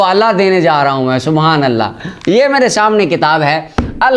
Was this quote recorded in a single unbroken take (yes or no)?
yes